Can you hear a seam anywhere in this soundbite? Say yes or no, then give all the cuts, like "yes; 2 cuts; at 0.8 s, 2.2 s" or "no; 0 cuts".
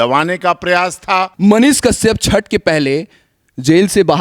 yes; 1 cut; at 1.3 s